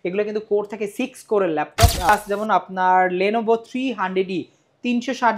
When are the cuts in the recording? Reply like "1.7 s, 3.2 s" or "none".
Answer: 2.1 s